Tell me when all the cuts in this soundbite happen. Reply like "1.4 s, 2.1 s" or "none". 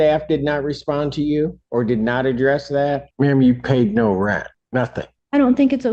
1.6 s, 3.1 s, 4.8 s